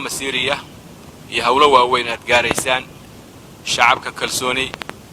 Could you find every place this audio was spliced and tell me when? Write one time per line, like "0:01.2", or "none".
none